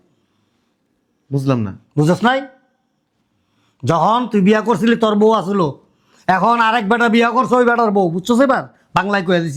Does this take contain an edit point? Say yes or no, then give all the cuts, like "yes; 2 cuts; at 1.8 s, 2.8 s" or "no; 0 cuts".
no; 0 cuts